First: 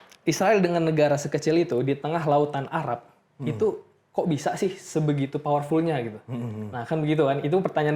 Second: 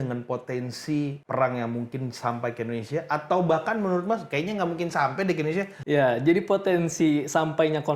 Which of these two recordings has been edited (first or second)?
second